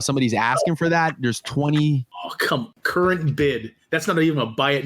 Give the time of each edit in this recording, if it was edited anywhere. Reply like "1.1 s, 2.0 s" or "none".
2.6 s